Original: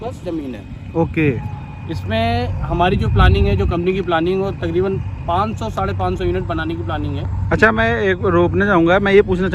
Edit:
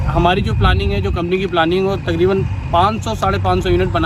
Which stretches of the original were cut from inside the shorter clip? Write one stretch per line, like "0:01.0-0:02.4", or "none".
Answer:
none